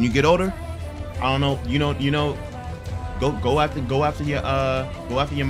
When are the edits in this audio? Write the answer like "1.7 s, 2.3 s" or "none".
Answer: none